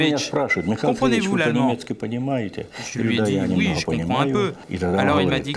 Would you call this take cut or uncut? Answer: cut